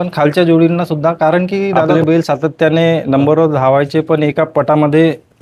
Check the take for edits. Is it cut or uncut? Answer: cut